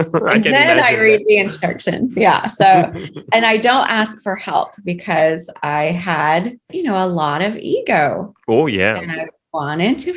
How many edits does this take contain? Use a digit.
1